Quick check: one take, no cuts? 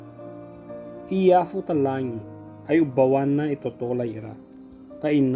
no; 1 cut; at 1.1 s

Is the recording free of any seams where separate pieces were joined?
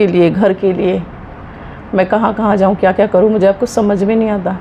yes; 0 cuts

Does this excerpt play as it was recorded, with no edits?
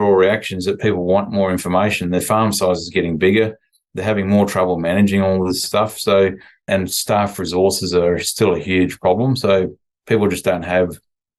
no; 2 cuts; at 5.6 s, 6.6 s

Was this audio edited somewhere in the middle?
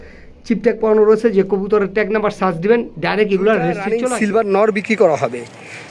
yes; 1 cut; at 3.8 s

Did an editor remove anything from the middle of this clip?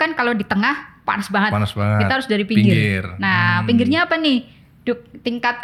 no; 0 cuts

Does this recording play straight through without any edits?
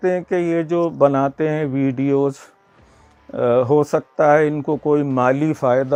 yes; 0 cuts

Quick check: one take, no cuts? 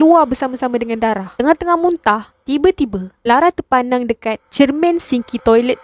yes; 0 cuts

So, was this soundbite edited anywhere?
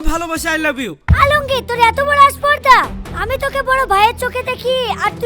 yes; 1 cut; at 1.0 s

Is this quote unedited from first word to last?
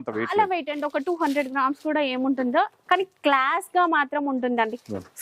yes; 0 cuts

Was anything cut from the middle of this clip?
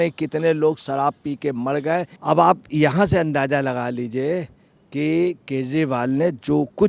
yes; 1 cut; at 2.1 s

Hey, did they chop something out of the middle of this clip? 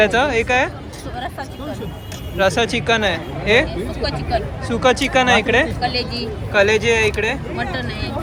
no; 0 cuts

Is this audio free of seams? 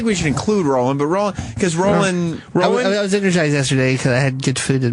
yes; 0 cuts

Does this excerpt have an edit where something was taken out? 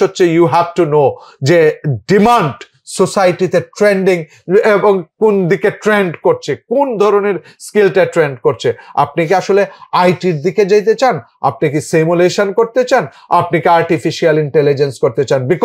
no; 0 cuts

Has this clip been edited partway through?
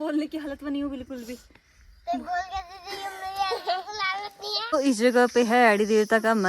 yes; 1 cut; at 4.8 s

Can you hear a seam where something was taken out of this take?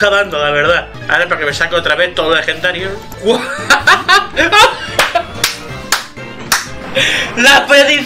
yes; 2 cuts; at 0.9 s, 3.1 s

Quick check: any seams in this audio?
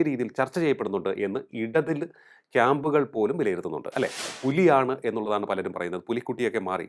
yes; 1 cut; at 4.3 s

